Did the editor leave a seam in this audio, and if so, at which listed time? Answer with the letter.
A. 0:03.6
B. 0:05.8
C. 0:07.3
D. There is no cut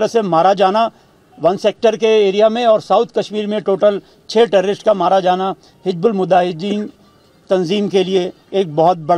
D